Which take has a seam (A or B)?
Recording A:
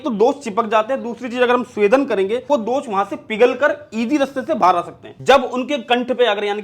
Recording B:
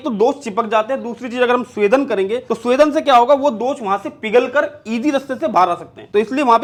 A